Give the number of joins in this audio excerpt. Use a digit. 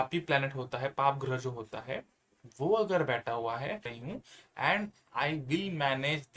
1